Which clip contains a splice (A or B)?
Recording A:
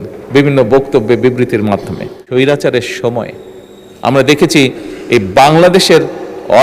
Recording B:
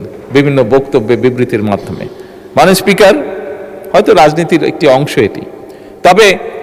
A